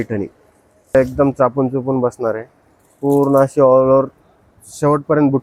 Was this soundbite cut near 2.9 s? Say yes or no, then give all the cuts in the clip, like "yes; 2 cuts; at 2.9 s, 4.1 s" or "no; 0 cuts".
no; 1 cut; at 0.9 s